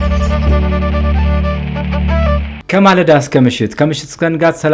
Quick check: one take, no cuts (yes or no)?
yes